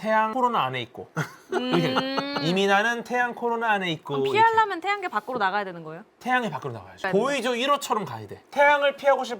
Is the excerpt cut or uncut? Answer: cut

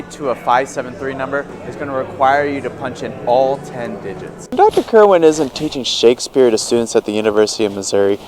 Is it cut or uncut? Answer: cut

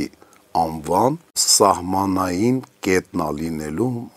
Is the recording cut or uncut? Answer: cut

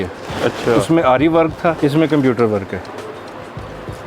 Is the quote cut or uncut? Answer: cut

